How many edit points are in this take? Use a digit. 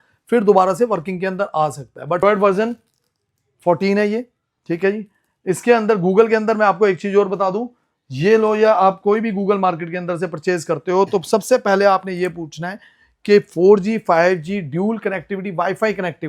1